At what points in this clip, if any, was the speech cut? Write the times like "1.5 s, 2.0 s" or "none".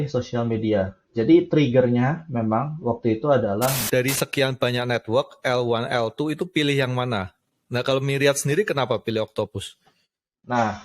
3.8 s